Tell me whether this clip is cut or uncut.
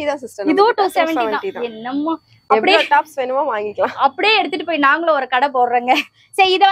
uncut